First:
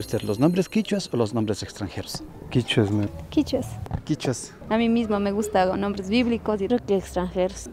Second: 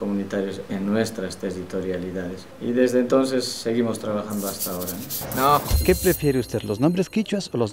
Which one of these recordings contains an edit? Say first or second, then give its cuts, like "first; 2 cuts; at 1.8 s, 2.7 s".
second; 1 cut; at 5.2 s